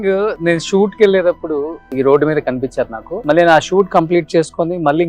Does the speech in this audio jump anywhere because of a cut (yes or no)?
yes